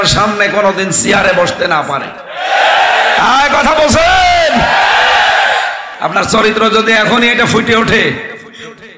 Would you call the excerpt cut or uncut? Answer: cut